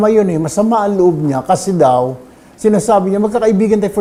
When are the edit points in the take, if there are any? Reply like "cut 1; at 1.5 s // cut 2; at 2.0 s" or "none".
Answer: none